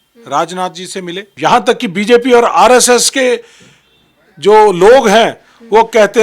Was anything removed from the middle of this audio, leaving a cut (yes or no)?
yes